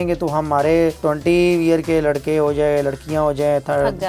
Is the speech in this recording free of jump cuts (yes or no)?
no